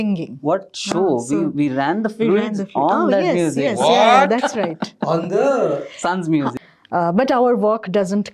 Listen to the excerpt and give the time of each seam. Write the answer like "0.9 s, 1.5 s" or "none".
6.5 s